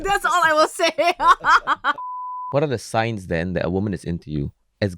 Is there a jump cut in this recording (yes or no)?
yes